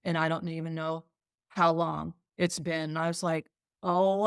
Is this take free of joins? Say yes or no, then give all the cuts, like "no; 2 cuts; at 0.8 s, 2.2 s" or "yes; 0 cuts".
yes; 0 cuts